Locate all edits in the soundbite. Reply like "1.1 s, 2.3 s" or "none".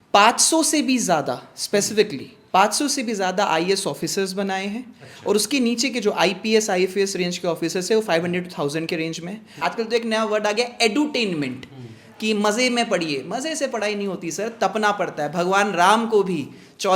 9.6 s